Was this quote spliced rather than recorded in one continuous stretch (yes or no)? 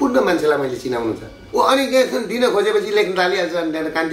yes